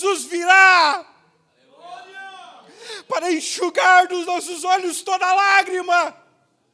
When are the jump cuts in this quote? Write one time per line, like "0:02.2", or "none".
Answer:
none